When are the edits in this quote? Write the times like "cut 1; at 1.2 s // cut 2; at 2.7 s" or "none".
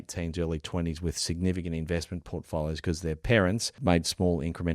cut 1; at 3.7 s